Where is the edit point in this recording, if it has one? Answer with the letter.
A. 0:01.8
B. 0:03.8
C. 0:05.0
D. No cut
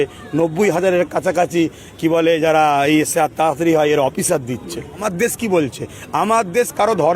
C